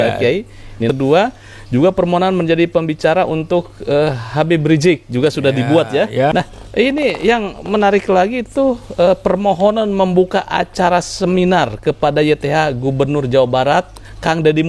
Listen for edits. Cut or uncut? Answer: cut